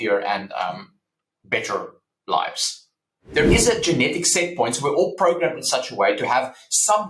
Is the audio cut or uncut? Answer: cut